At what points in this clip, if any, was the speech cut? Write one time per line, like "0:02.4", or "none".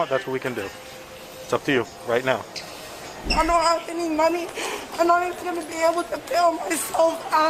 0:03.3

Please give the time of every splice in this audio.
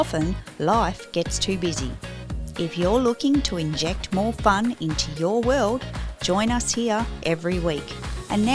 0:06.7

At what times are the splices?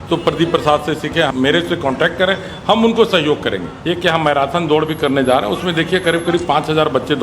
0:01.3
0:03.7

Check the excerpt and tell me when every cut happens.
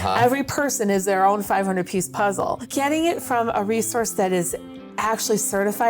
0:02.6

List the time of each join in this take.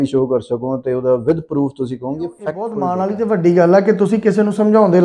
0:02.7

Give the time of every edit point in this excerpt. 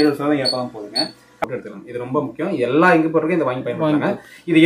0:01.4

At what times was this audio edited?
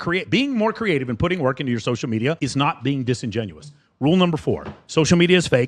0:02.4

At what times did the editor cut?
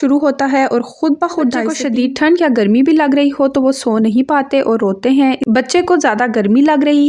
0:01.8

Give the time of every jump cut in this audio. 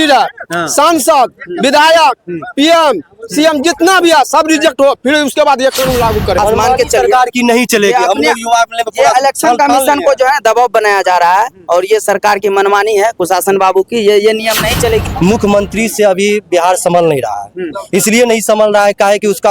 0:06.4
0:15.1

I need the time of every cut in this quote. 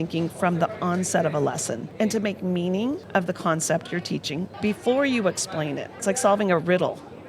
0:01.8
0:03.0
0:04.5
0:06.0

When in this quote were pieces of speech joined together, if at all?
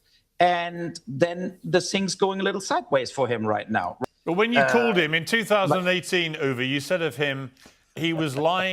0:03.9

